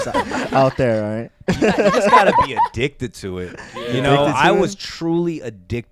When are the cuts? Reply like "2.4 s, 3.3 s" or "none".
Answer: none